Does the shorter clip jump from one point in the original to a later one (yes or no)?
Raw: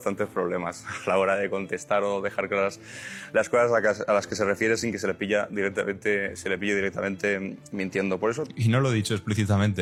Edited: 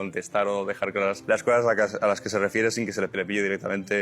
yes